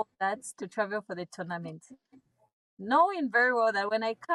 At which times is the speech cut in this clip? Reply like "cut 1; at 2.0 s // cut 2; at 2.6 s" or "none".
none